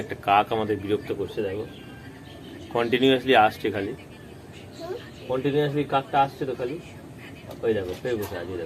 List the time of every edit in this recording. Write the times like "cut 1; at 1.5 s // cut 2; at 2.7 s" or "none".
none